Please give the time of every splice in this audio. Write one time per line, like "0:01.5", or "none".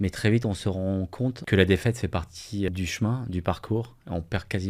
0:01.4
0:02.7